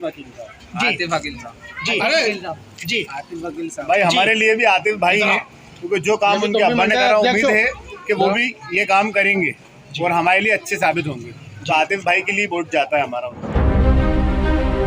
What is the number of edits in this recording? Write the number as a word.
one